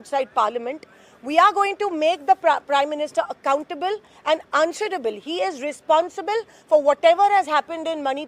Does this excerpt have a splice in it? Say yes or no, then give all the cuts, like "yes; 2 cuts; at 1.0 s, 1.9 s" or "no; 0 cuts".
no; 0 cuts